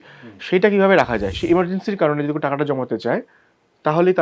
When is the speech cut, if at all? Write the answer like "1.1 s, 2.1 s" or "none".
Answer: 1.3 s